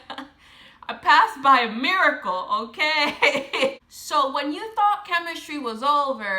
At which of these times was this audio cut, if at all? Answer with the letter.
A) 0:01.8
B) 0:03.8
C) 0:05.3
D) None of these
B